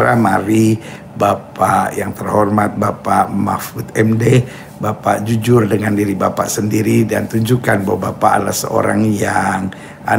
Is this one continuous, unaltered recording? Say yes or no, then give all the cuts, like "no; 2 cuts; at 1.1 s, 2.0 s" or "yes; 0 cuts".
yes; 0 cuts